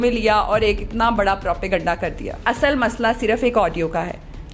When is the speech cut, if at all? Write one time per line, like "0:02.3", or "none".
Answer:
0:02.4